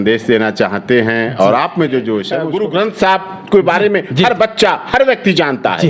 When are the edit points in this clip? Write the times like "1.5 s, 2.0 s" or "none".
2.3 s